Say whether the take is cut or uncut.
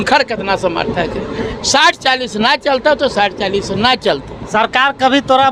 uncut